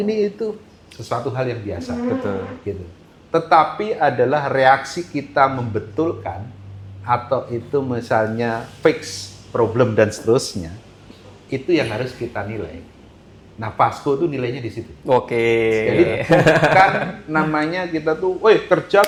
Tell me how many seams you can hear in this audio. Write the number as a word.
zero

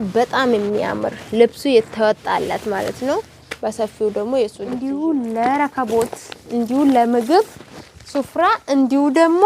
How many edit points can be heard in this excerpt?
one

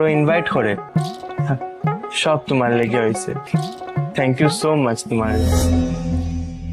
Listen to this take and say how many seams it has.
one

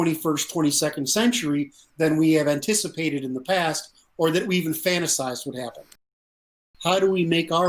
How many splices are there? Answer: one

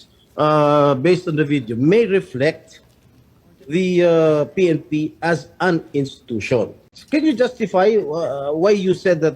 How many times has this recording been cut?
one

